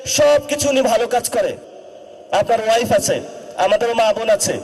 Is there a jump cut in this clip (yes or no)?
yes